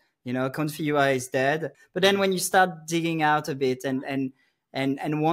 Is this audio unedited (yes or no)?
no